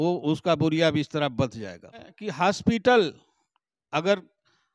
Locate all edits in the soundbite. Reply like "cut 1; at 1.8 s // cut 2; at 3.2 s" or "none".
cut 1; at 2.2 s